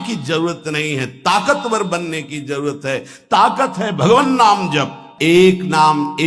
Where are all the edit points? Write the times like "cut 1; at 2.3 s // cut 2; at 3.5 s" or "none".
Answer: cut 1; at 5.0 s